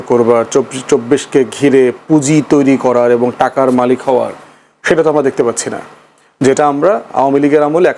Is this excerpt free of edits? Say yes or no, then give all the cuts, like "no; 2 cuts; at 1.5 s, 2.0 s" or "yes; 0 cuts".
yes; 0 cuts